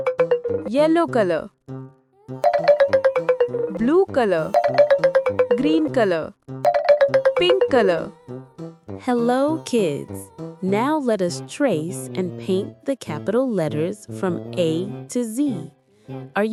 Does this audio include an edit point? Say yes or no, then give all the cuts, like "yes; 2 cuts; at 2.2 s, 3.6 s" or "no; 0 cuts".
no; 0 cuts